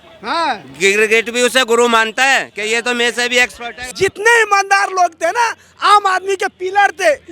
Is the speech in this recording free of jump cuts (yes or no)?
no